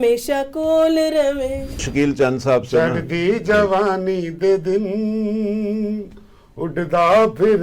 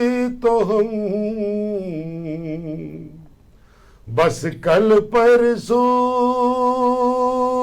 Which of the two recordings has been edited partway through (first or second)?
first